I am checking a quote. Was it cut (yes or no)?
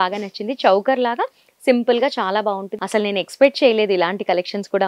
yes